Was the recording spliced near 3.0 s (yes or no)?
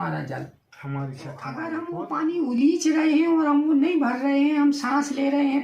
no